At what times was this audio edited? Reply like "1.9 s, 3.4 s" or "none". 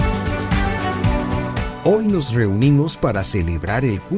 1.7 s